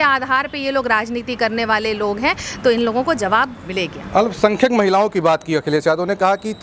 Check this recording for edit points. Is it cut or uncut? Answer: uncut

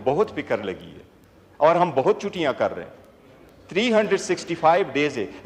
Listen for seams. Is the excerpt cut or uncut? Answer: uncut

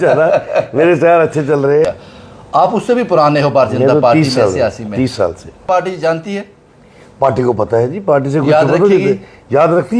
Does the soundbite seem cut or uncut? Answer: cut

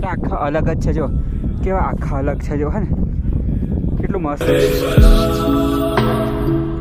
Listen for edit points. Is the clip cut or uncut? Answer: uncut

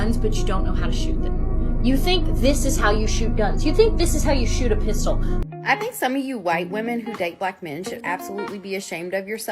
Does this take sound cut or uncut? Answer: cut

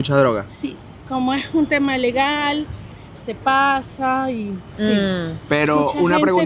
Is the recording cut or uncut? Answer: uncut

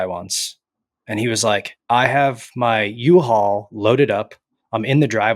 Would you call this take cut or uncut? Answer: cut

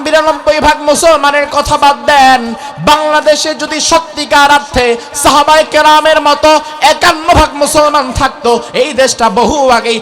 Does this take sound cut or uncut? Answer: uncut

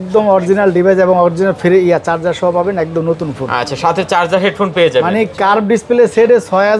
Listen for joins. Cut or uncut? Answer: uncut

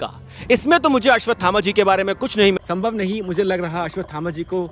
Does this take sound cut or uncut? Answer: cut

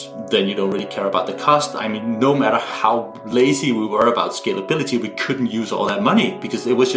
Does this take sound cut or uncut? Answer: uncut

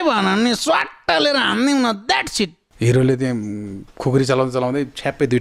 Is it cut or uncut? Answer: cut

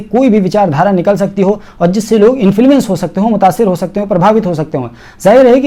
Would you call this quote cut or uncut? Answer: uncut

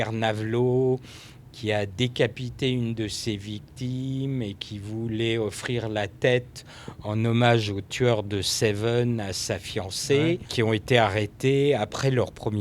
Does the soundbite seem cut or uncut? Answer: cut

